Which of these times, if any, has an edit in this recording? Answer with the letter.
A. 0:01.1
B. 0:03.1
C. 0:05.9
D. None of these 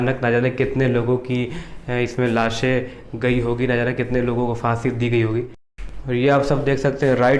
D